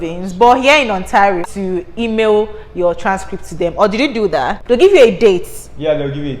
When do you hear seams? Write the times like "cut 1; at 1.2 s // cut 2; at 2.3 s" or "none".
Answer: cut 1; at 1.4 s // cut 2; at 4.6 s